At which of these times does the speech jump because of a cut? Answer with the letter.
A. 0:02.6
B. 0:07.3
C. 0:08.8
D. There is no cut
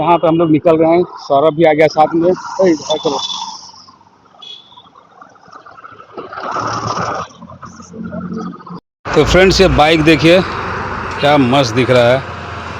C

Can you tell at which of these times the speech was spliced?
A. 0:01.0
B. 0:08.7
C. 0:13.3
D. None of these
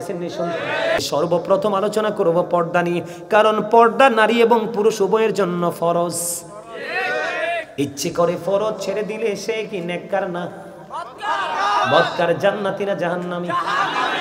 A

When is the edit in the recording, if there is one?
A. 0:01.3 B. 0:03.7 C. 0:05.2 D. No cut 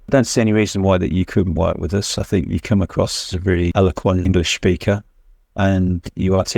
B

